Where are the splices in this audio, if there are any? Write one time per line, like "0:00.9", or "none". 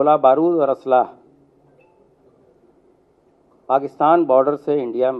none